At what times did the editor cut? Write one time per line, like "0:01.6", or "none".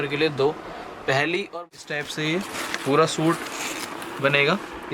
0:01.5